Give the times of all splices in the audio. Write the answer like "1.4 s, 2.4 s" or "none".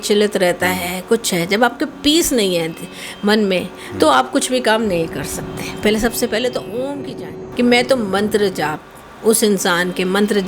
7.4 s